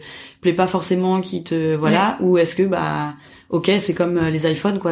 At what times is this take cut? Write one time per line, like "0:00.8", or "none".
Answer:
none